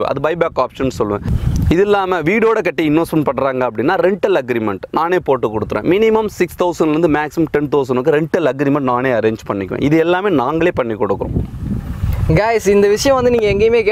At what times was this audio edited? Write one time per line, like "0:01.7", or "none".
none